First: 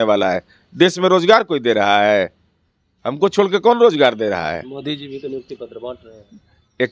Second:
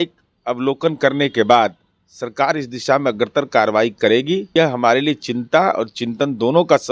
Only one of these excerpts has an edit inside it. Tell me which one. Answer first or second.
second